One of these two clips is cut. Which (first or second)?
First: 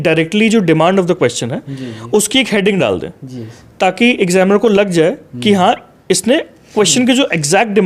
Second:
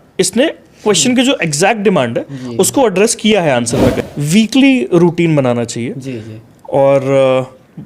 second